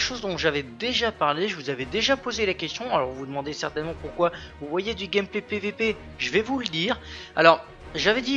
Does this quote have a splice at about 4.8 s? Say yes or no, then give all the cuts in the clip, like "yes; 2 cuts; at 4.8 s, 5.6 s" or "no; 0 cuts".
no; 1 cut; at 1.9 s